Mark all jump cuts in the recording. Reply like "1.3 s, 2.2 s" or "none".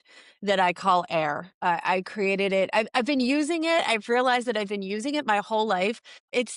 none